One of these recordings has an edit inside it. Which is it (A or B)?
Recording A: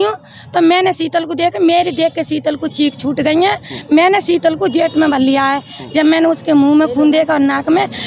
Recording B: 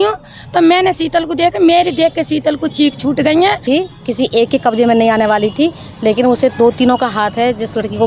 B